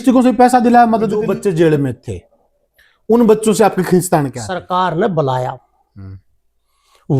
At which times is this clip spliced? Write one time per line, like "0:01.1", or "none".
0:01.2
0:04.5